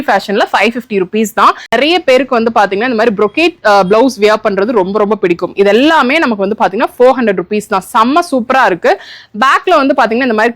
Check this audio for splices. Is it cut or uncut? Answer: cut